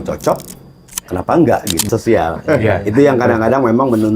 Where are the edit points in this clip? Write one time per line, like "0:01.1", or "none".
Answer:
0:01.9